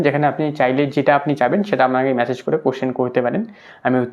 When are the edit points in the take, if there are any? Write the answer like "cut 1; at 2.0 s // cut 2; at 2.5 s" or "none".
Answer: none

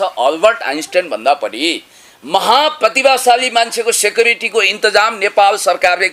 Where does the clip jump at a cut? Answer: none

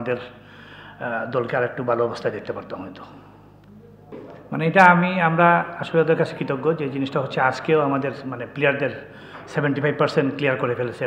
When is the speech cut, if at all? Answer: cut 1; at 4.1 s

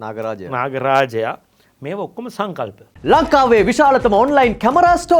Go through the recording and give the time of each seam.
cut 1; at 2.9 s

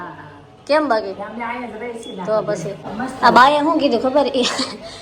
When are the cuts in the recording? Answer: cut 1; at 2.9 s

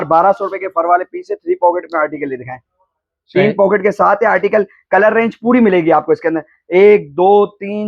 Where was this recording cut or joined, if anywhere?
none

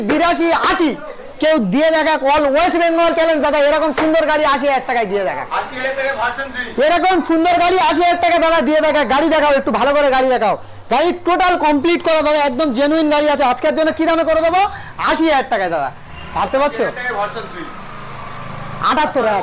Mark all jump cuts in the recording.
none

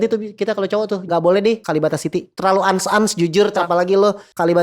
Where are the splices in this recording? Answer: cut 1; at 1.0 s // cut 2; at 2.3 s // cut 3; at 3.6 s

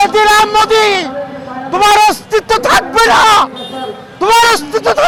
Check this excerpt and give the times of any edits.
none

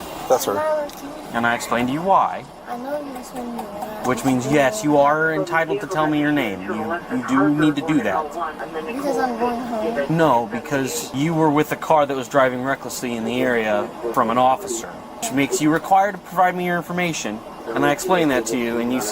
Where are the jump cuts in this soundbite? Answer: cut 1; at 1.1 s // cut 2; at 2.5 s // cut 3; at 8.6 s // cut 4; at 10.1 s // cut 5; at 11.0 s // cut 6; at 14.1 s // cut 7; at 15.2 s // cut 8; at 17.7 s

